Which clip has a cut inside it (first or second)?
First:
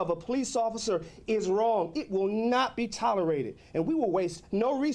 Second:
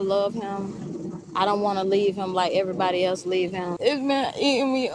second